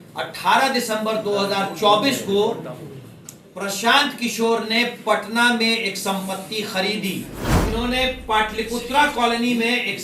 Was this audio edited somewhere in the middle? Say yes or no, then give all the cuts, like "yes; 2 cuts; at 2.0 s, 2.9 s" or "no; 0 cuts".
yes; 1 cut; at 7.4 s